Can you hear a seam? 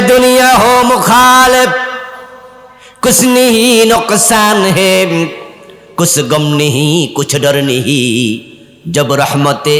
no; 0 cuts

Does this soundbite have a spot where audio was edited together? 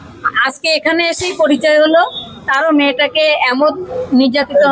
no; 0 cuts

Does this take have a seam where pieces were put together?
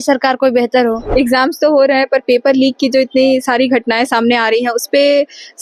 yes; 1 cut; at 1.0 s

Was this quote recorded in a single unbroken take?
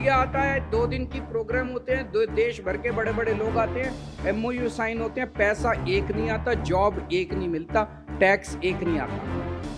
yes; 0 cuts

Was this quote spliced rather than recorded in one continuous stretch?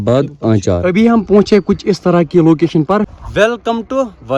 yes; 2 cuts; at 0.8 s, 3.1 s

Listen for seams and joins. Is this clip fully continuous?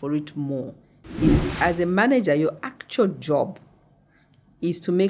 no; 1 cut; at 1.3 s

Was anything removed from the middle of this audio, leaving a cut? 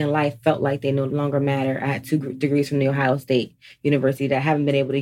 yes; 1 cut; at 1.1 s

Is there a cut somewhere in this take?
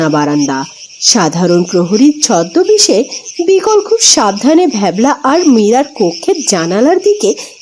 no; 0 cuts

